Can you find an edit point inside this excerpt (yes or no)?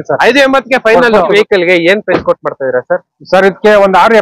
yes